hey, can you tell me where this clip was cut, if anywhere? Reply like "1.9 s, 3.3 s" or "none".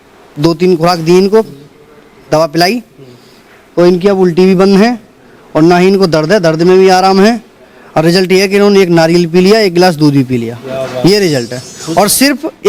none